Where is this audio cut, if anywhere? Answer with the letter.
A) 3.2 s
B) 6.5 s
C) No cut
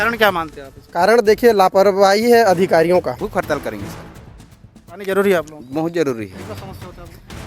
A